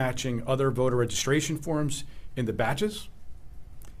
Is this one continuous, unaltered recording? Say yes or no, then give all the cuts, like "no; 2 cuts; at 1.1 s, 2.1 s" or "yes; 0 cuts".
yes; 0 cuts